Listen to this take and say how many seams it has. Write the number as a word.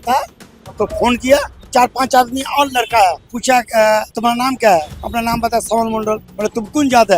five